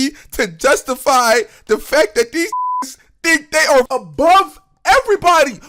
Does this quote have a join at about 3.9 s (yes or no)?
yes